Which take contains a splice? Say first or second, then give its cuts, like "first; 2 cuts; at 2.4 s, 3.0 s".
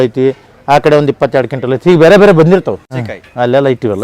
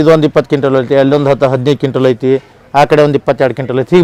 first; 1 cut; at 2.9 s